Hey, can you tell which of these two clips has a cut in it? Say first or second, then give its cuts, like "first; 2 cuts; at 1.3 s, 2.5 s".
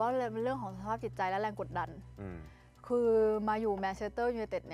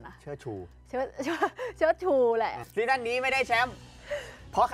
second; 1 cut; at 2.6 s